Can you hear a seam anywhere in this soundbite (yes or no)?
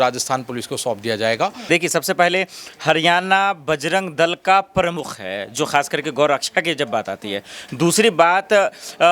yes